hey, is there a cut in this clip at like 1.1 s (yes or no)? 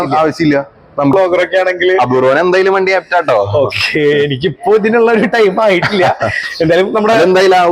yes